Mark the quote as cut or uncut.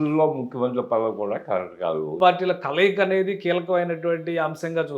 cut